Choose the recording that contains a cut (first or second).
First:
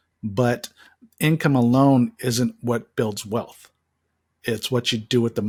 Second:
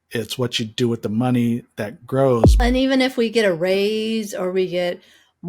second